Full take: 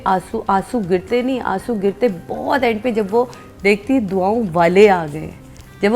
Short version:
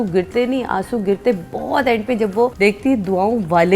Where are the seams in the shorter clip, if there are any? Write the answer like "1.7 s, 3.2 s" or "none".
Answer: 2.5 s